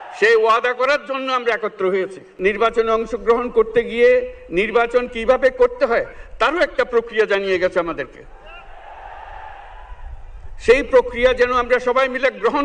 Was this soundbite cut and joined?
yes; 1 cut; at 2.3 s

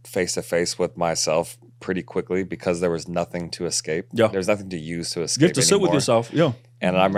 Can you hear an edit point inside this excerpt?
no; 0 cuts

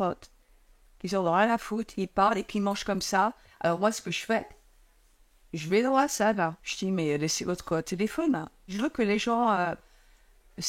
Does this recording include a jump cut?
yes; 3 cuts; at 3.5 s, 6.7 s, 8.6 s

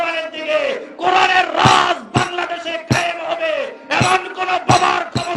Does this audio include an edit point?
no; 0 cuts

